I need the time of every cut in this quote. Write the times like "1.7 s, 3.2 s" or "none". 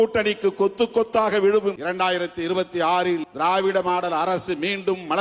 1.8 s, 3.3 s